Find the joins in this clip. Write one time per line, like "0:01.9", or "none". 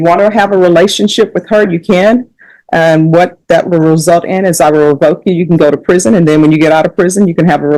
none